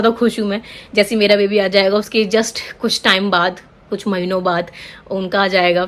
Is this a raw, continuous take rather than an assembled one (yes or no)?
yes